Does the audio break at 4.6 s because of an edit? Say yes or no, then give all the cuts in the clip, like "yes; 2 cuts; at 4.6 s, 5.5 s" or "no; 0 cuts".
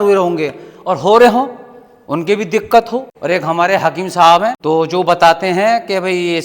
yes; 2 cuts; at 3.1 s, 4.6 s